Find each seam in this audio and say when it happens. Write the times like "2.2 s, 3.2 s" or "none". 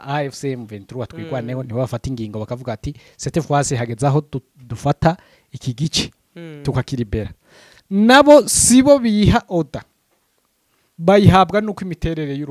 none